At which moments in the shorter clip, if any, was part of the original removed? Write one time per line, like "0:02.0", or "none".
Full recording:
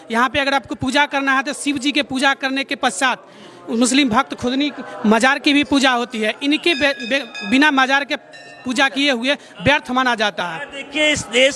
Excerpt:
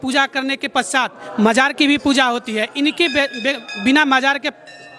0:01.2